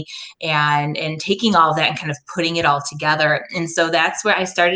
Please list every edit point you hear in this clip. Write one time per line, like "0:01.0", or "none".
none